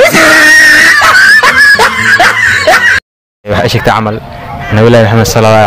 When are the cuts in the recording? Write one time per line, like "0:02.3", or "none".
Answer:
0:03.2